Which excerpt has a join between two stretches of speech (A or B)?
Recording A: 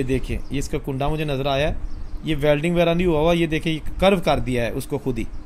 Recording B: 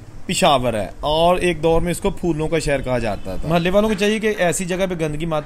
B